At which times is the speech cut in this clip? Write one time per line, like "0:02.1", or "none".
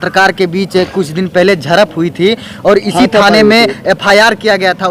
none